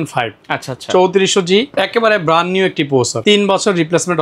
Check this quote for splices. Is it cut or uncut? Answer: cut